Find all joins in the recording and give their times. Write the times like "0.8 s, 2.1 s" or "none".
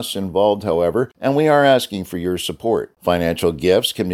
1.1 s